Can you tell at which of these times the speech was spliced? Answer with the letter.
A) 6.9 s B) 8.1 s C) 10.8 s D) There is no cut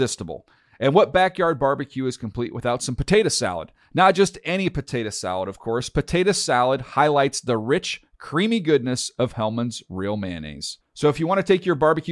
D